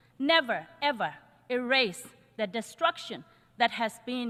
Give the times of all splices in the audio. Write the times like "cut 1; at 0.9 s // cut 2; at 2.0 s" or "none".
none